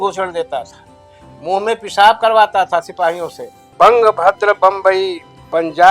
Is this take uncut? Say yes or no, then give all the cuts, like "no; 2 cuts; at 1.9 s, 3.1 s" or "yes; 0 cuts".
no; 1 cut; at 3.6 s